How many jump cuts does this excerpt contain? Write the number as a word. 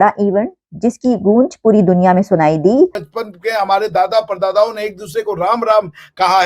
one